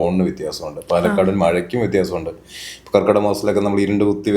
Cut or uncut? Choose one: uncut